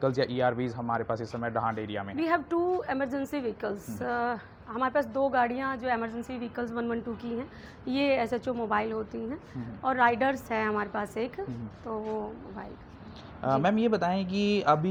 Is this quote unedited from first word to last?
yes; 0 cuts

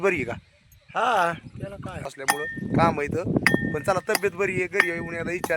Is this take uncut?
no; 1 cut; at 2.1 s

